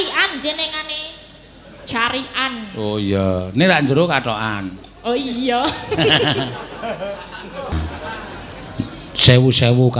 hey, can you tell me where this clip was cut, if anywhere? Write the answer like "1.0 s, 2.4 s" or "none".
7.7 s